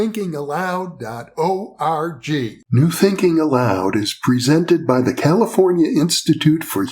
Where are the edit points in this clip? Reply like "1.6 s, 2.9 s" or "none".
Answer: 2.6 s